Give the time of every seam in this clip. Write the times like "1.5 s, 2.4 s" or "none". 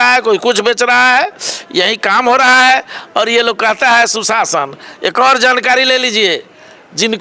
none

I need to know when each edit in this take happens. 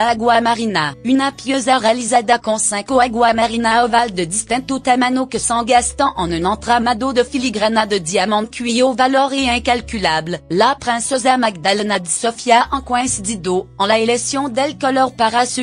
12.7 s

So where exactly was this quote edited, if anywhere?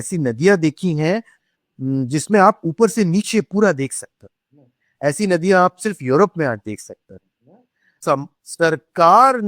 7.9 s

